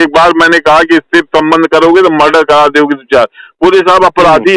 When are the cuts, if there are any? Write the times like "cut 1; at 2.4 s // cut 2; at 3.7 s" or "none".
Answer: none